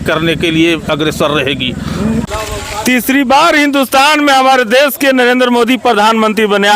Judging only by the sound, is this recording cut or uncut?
cut